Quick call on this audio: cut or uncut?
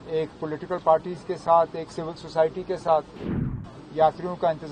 cut